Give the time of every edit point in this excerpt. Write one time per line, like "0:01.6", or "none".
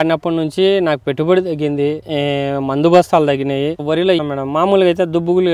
0:03.9